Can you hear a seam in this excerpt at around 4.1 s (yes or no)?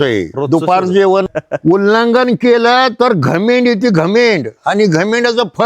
no